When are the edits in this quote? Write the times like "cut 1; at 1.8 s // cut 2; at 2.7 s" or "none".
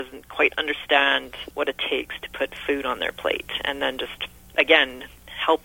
cut 1; at 1.4 s // cut 2; at 4.5 s